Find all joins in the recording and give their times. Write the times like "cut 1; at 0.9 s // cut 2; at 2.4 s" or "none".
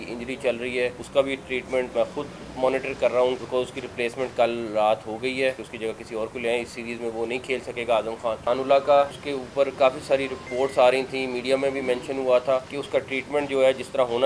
cut 1; at 1.0 s // cut 2; at 1.9 s // cut 3; at 3.4 s // cut 4; at 5.7 s // cut 5; at 8.4 s // cut 6; at 9.2 s // cut 7; at 10.5 s // cut 8; at 12.7 s